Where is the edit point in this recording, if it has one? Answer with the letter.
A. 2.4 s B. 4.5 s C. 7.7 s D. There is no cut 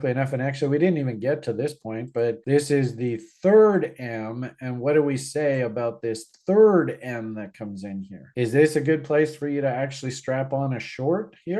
A